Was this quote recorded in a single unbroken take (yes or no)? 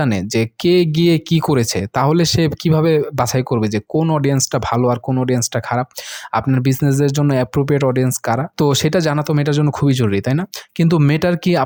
yes